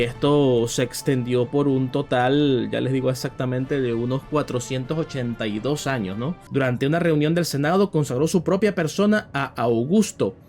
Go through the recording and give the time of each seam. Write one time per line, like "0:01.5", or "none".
0:06.3

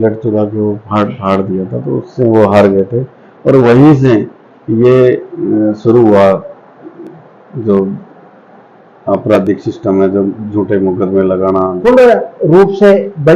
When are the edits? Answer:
0:11.8

